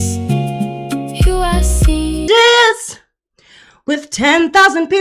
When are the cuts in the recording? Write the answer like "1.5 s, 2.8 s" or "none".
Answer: 2.2 s